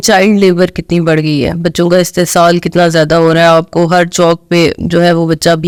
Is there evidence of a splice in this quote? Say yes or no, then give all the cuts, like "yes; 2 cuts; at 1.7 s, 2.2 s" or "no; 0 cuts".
no; 0 cuts